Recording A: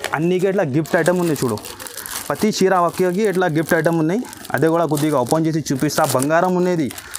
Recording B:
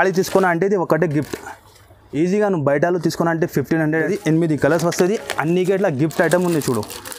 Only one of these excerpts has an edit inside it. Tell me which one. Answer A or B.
B